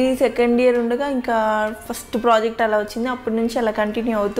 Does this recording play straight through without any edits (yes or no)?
yes